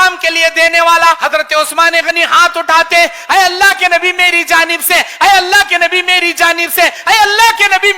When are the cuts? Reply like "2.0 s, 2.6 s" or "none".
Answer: 1.2 s